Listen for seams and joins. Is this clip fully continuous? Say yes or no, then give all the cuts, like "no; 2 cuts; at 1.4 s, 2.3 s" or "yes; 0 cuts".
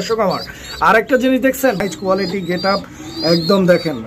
no; 1 cut; at 1.9 s